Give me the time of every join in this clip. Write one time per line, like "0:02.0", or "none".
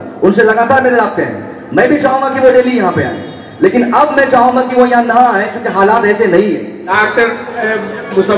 0:06.8